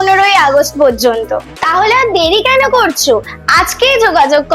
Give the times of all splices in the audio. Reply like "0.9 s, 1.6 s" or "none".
none